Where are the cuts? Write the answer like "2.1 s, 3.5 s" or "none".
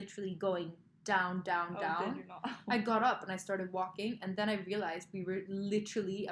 none